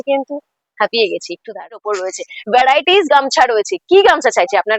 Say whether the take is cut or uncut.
cut